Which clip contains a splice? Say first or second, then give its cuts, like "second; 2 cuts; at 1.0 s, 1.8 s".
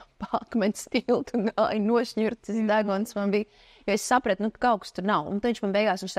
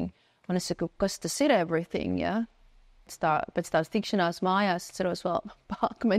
second; 1 cut; at 3.1 s